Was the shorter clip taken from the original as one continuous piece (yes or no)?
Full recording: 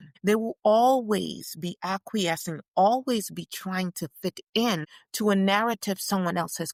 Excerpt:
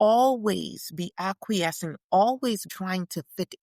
no